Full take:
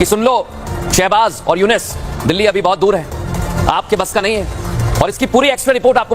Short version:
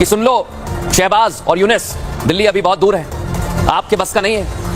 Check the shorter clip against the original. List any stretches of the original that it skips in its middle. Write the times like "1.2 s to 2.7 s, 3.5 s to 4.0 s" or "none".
none